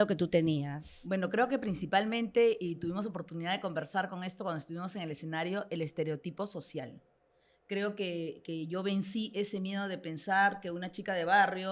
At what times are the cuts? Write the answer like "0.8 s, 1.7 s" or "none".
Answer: none